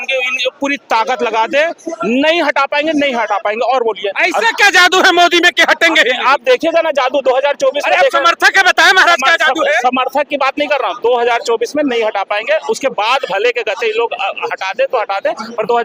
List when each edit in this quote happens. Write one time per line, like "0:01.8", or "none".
none